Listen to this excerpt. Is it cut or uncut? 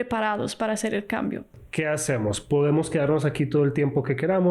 cut